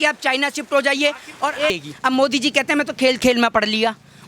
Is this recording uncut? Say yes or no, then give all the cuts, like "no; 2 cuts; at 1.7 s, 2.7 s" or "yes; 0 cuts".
no; 1 cut; at 1.6 s